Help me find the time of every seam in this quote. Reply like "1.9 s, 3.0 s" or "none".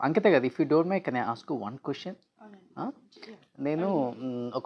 none